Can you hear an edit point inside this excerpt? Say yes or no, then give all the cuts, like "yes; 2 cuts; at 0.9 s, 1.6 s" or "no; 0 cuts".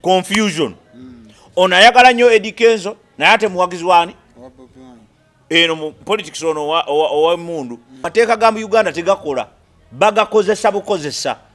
yes; 1 cut; at 8.1 s